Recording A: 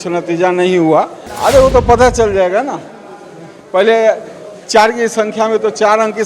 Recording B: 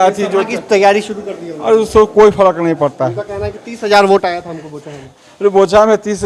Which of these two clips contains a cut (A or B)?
A